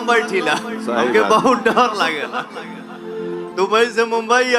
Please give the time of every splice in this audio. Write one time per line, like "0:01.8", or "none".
0:03.5